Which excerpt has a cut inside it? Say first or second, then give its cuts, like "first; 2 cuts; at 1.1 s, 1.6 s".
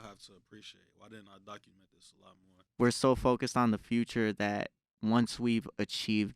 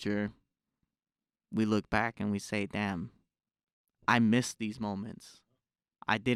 first; 1 cut; at 2.5 s